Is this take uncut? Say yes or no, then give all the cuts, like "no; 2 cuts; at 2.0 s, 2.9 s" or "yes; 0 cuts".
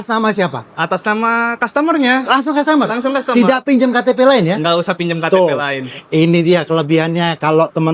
yes; 0 cuts